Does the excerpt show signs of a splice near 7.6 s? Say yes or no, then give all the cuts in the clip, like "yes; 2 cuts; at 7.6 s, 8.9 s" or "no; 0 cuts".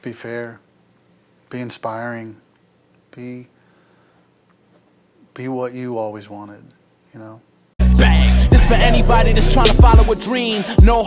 yes; 1 cut; at 7.6 s